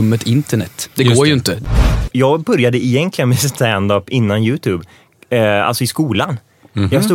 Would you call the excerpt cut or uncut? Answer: cut